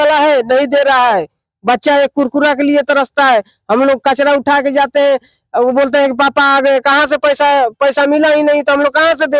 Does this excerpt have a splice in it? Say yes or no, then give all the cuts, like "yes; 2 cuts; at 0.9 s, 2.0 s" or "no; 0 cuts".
no; 0 cuts